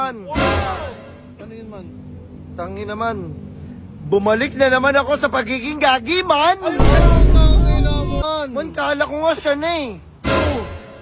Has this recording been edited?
yes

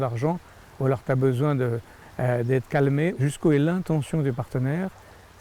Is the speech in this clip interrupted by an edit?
yes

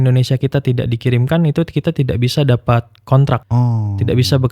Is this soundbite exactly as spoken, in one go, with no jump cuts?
no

